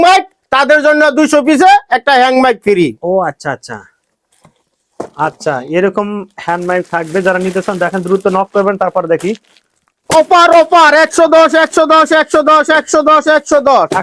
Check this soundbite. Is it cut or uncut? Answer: uncut